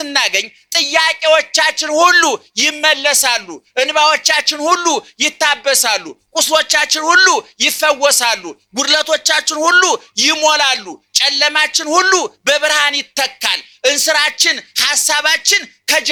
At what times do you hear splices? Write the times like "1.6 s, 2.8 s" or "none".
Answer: none